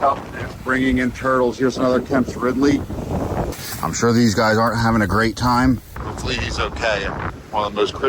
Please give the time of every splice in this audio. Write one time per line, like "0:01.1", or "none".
0:03.5
0:06.0
0:07.3